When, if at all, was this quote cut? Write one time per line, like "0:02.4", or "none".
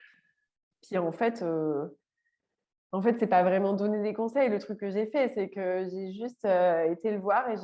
none